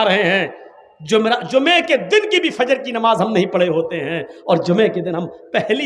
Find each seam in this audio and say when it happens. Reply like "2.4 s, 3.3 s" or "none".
none

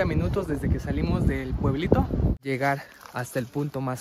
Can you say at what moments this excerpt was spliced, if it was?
2.3 s

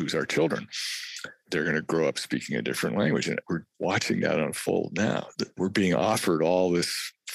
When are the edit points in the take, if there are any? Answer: 3.4 s, 5.6 s

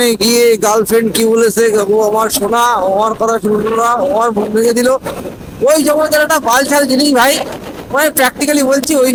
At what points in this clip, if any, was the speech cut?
none

